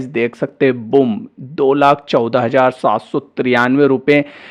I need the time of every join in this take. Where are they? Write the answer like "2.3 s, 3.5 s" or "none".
none